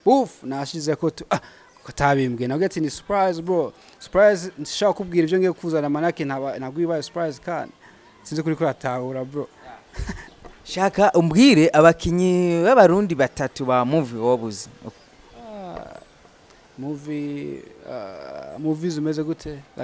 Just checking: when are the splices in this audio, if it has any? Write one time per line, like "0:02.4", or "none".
none